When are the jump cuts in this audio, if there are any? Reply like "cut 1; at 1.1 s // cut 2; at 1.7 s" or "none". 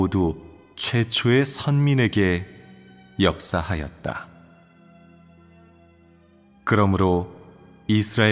cut 1; at 3.7 s